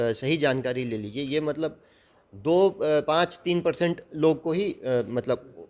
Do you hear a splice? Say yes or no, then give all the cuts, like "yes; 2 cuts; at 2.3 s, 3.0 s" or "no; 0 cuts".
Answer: no; 0 cuts